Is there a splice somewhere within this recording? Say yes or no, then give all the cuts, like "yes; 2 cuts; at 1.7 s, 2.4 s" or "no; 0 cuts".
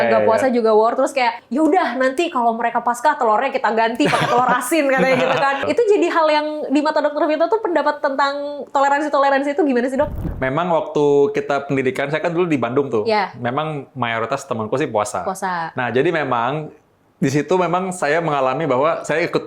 yes; 3 cuts; at 1.4 s, 5.6 s, 10.2 s